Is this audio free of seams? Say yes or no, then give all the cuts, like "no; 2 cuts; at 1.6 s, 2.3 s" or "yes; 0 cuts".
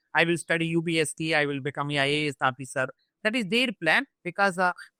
yes; 0 cuts